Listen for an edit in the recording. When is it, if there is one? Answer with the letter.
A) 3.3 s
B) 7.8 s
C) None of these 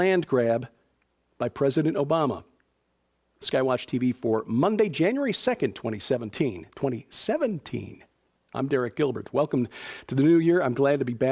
B